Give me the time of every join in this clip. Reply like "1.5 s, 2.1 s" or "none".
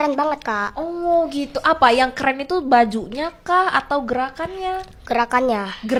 none